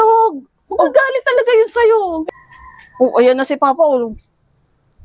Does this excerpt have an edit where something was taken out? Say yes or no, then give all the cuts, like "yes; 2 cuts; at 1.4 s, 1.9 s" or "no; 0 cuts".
yes; 1 cut; at 2.2 s